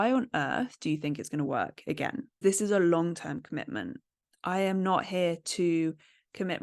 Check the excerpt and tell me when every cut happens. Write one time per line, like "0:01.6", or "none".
0:02.4